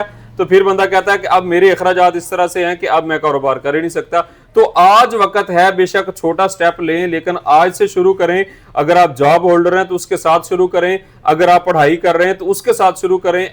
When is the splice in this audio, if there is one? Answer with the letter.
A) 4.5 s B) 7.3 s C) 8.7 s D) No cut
D